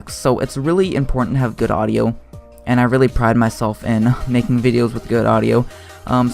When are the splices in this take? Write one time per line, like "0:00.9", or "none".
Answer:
0:02.8